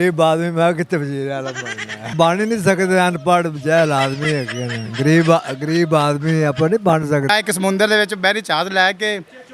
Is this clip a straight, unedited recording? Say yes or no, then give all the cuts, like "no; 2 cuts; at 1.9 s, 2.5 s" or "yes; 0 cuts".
no; 2 cuts; at 2.1 s, 7.3 s